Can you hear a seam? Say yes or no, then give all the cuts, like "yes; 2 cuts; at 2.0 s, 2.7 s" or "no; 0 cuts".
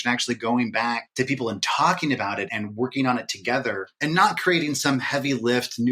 yes; 3 cuts; at 1.1 s, 2.5 s, 3.9 s